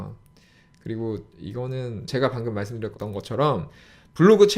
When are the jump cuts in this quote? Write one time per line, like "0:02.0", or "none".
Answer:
0:02.1
0:02.9